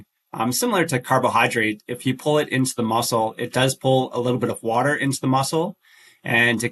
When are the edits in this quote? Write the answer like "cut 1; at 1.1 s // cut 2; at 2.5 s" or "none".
none